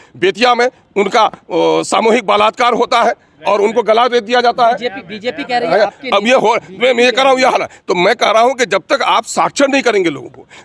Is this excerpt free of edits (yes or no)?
yes